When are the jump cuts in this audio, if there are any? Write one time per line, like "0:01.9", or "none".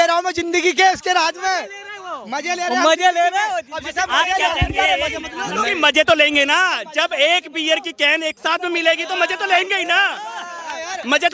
none

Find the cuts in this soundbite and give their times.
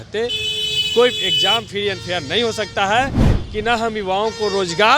0:03.3

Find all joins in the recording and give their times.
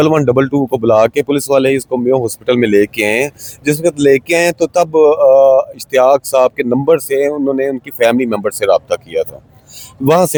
none

